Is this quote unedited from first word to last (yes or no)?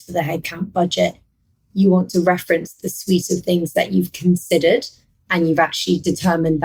yes